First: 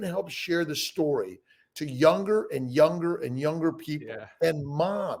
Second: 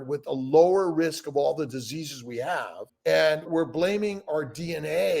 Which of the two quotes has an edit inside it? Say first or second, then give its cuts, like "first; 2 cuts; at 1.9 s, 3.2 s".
second; 1 cut; at 2.8 s